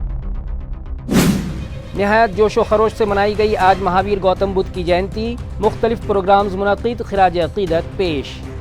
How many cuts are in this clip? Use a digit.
1